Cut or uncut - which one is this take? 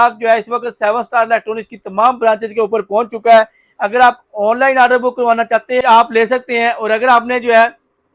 cut